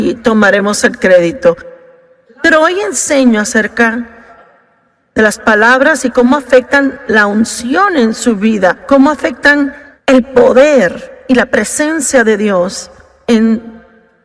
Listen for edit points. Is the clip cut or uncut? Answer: cut